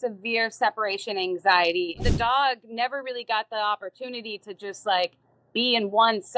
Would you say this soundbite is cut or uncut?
cut